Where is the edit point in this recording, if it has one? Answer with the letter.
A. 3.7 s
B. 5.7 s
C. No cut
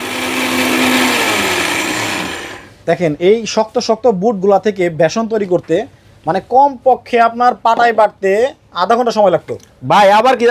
C